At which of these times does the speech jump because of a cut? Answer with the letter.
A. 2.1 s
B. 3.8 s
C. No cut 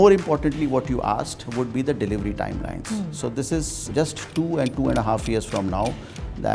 B